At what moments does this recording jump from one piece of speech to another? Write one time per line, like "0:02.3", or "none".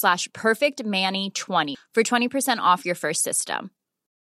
0:01.7